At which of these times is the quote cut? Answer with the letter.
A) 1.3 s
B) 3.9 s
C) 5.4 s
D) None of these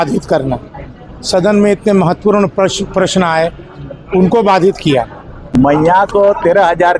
C